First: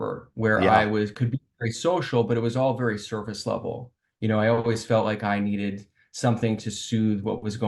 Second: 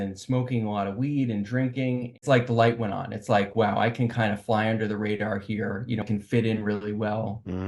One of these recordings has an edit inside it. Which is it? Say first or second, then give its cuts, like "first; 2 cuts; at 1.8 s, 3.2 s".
second; 2 cuts; at 2.2 s, 6.0 s